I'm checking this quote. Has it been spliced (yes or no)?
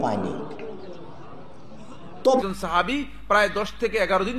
yes